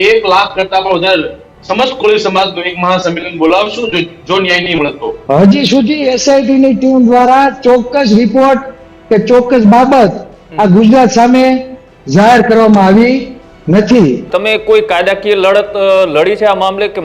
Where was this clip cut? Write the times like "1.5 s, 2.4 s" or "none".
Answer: 5.1 s, 14.2 s